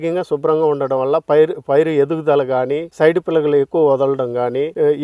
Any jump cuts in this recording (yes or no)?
no